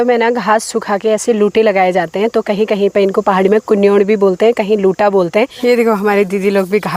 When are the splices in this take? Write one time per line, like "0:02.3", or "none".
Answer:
0:05.5